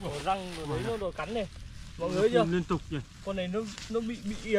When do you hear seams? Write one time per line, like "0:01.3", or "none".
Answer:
none